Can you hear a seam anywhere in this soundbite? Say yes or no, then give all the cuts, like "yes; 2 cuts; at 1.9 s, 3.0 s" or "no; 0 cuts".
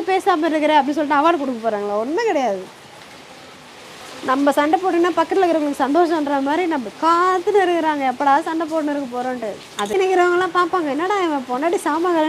yes; 1 cut; at 9.9 s